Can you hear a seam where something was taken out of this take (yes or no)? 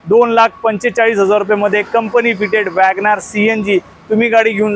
no